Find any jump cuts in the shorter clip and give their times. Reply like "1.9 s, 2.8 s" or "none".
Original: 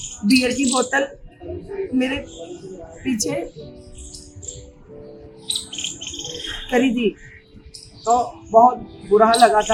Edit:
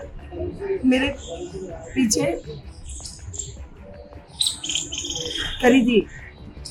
none